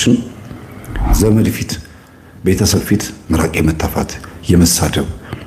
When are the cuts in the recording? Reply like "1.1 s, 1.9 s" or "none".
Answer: 1.1 s